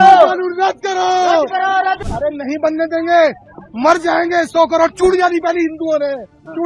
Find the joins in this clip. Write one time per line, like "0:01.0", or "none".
0:02.0